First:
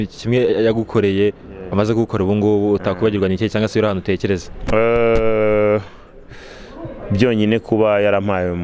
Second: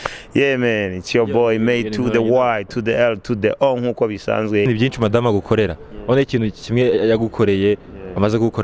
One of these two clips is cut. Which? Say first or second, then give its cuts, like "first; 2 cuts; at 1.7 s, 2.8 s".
second; 1 cut; at 4.7 s